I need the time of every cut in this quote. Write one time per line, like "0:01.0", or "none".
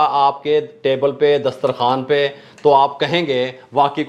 none